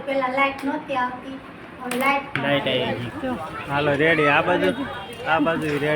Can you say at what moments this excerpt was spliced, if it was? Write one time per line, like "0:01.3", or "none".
0:03.0

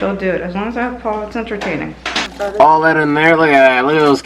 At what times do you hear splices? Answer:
0:02.3

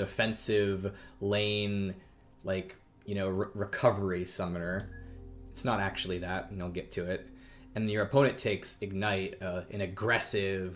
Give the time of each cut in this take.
none

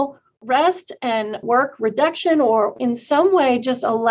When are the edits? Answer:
0:01.4
0:02.8

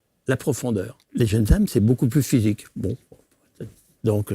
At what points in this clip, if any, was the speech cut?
0:01.0

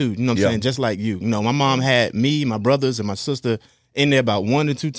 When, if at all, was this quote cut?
none

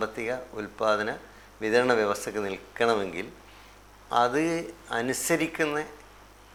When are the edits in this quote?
none

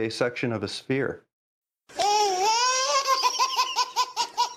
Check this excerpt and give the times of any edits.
none

